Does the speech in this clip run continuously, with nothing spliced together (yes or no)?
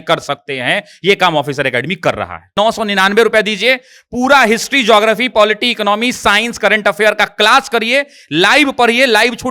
no